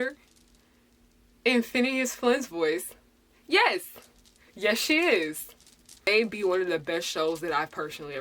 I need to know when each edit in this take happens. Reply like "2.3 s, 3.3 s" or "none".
6.1 s